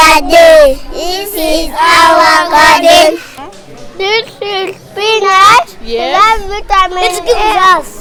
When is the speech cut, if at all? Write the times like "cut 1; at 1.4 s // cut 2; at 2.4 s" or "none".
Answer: none

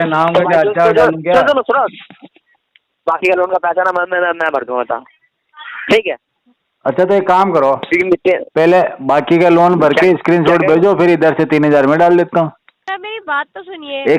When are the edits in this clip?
cut 1; at 12.9 s

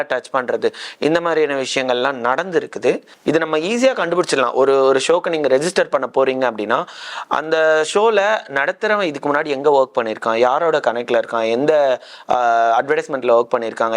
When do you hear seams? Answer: cut 1; at 3.1 s

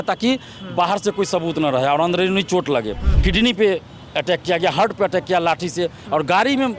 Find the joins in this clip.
cut 1; at 3.1 s

